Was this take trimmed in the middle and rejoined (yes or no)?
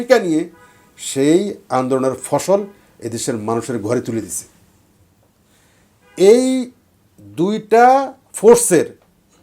no